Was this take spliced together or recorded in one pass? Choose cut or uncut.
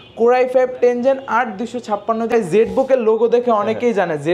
cut